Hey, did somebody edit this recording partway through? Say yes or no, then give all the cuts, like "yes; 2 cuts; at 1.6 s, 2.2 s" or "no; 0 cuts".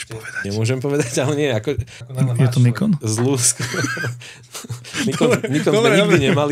yes; 1 cut; at 2.0 s